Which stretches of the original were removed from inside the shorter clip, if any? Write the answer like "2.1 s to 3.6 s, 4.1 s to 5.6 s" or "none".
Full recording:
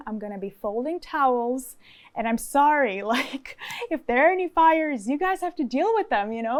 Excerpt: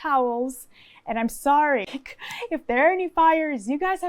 3.0 s to 3.3 s